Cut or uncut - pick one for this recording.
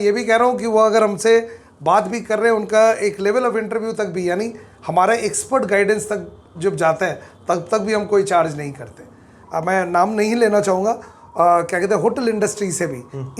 cut